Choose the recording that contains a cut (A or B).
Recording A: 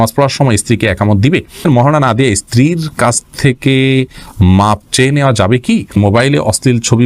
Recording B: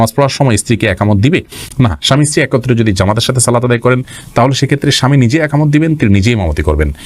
A